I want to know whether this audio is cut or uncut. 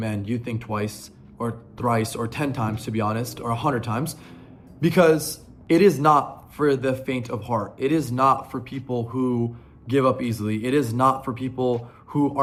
uncut